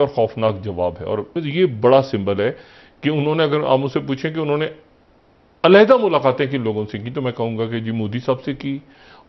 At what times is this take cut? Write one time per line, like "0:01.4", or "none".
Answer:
none